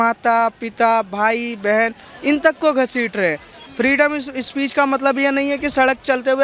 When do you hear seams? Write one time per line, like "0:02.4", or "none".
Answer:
0:03.6